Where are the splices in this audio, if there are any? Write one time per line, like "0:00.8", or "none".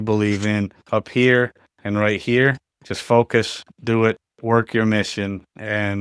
none